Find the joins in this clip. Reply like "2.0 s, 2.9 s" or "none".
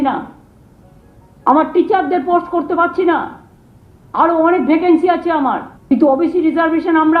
5.7 s